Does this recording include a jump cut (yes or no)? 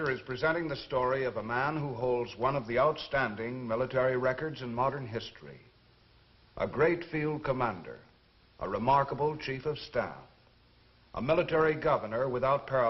yes